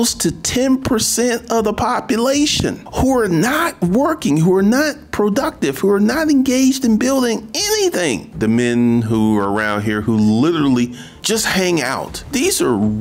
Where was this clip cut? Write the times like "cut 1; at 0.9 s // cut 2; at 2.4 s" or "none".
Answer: cut 1; at 8.3 s // cut 2; at 12.1 s